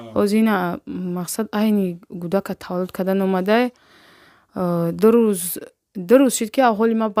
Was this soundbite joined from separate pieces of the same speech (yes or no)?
no